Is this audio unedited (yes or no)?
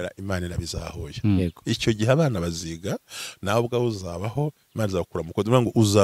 no